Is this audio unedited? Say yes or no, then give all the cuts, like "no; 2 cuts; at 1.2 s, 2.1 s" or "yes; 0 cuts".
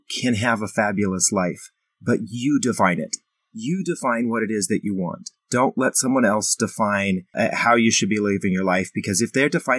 no; 1 cut; at 7.3 s